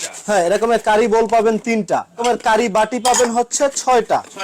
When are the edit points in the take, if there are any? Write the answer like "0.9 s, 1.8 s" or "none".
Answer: 2.2 s